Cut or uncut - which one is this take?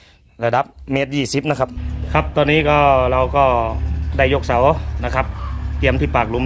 cut